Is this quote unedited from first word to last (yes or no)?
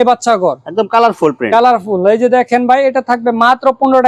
yes